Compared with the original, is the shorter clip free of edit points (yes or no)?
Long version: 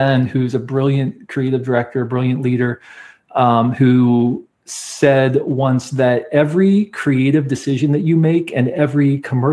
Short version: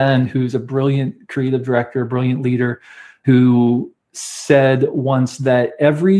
no